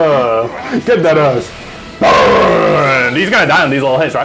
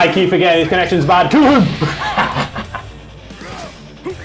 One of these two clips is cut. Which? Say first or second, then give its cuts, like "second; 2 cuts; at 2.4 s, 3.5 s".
second; 1 cut; at 3.0 s